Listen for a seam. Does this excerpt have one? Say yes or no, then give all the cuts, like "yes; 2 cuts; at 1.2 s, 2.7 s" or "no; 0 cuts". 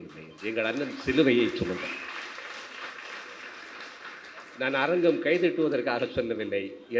no; 0 cuts